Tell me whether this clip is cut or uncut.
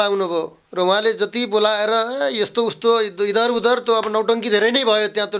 uncut